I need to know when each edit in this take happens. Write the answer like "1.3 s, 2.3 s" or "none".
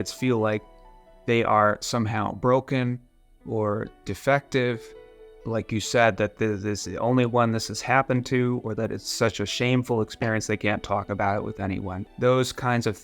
12.0 s